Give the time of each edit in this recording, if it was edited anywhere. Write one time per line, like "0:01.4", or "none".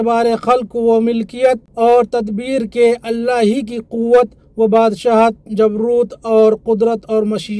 0:01.7

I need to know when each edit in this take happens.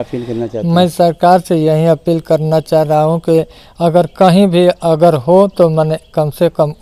none

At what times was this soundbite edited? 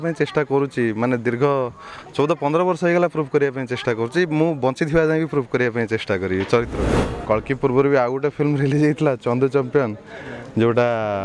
0:07.2

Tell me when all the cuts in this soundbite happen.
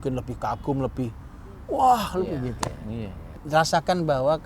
0:03.4

